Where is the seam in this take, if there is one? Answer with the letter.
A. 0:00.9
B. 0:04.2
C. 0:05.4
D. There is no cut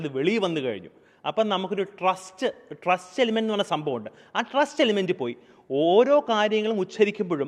D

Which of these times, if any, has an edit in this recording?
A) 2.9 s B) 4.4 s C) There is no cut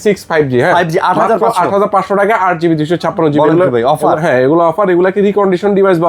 C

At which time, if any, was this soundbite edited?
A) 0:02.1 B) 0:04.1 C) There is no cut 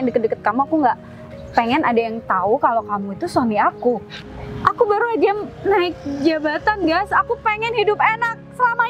B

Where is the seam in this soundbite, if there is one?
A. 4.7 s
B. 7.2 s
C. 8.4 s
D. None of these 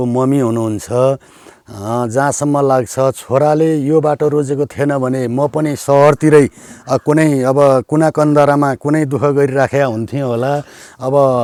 D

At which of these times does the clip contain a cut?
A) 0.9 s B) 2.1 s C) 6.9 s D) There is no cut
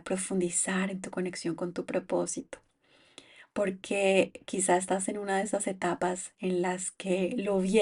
D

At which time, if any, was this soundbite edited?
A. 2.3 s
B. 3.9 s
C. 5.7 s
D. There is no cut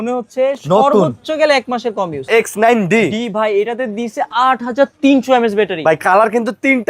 A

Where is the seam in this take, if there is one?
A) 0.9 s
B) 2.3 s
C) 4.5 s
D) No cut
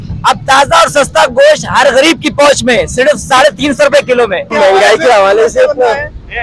C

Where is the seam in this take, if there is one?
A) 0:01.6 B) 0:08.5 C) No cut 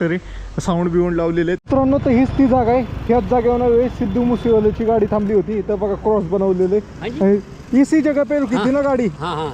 A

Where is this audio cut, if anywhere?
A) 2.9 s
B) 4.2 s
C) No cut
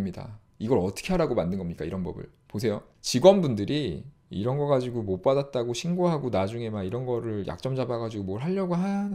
A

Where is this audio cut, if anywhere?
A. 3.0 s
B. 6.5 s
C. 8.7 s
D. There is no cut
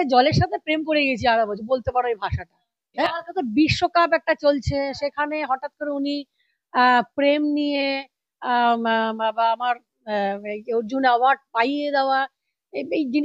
A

